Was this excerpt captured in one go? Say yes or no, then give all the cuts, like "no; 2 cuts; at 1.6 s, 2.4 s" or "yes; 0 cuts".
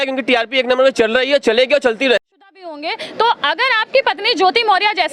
no; 1 cut; at 2.2 s